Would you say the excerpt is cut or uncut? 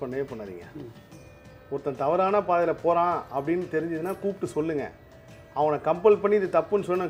uncut